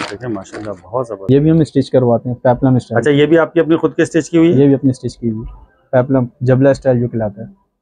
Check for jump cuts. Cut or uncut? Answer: cut